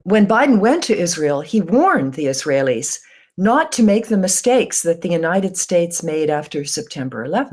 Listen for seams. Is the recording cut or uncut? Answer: uncut